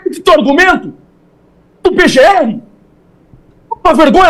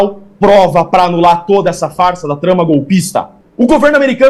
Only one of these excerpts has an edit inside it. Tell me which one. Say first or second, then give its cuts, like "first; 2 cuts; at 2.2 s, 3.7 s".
second; 1 cut; at 3.4 s